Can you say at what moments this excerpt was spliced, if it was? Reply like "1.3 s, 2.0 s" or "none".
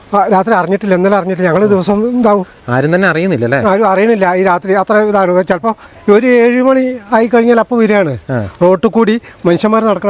none

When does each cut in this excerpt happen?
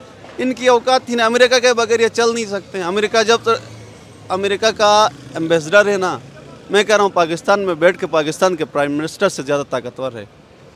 none

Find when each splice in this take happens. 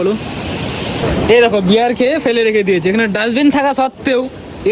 1.0 s

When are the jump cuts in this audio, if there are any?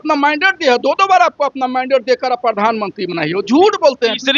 none

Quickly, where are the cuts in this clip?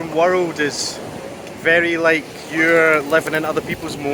none

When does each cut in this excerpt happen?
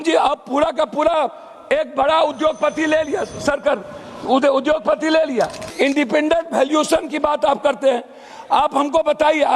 5.6 s

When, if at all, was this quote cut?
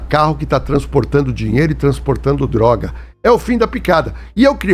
none

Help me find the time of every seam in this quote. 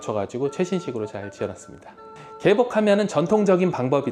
2.1 s

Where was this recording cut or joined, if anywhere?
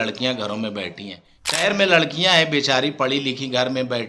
1.6 s

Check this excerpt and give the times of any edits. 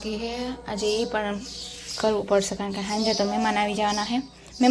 none

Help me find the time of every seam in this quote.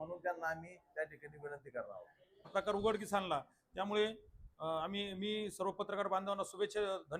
2.2 s

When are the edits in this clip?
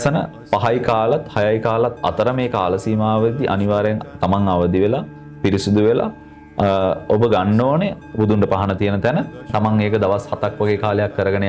8.0 s, 9.5 s

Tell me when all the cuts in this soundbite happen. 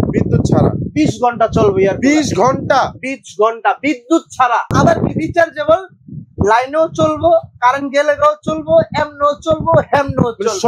4.7 s

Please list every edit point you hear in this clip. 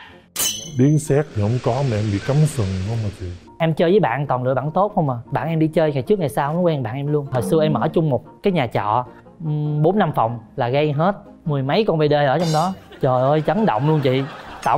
none

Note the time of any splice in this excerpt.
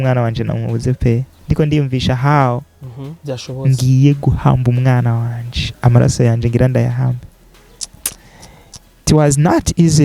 1.3 s

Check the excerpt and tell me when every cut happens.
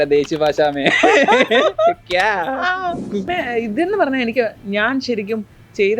3.3 s

